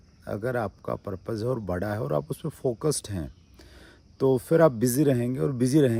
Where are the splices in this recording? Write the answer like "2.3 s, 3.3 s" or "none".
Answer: none